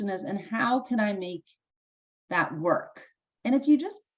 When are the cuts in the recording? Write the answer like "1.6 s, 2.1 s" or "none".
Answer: 3.3 s